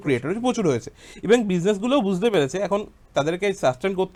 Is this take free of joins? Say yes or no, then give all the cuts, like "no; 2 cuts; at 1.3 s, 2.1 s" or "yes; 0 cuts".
yes; 0 cuts